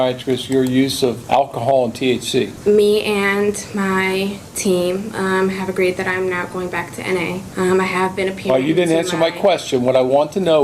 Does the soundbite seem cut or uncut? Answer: cut